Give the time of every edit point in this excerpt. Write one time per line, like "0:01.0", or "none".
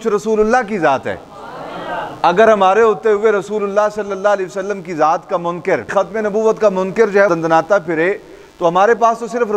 0:05.9
0:07.3